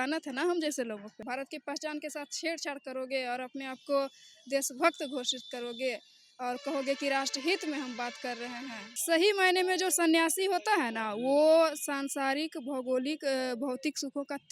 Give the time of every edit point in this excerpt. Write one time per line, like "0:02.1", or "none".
0:01.2
0:08.9